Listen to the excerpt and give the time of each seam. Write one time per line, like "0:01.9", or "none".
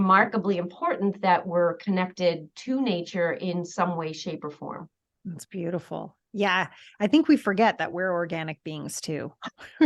none